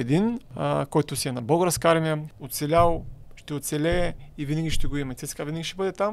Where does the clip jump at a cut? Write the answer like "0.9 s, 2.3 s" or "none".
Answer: 2.3 s